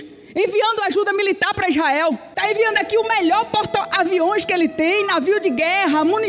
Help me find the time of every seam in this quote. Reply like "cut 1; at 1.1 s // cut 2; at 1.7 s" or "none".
none